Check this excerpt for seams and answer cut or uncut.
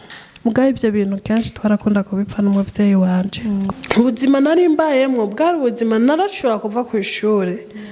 cut